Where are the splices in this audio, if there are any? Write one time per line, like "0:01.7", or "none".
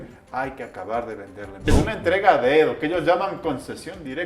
0:01.7